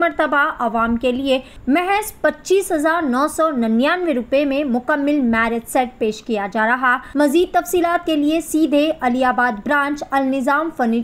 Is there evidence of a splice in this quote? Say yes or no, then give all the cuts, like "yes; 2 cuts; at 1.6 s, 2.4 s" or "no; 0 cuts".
yes; 2 cuts; at 1.5 s, 7.0 s